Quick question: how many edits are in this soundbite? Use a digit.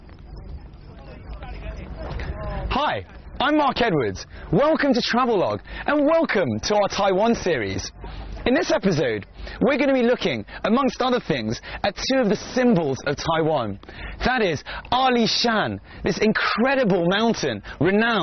1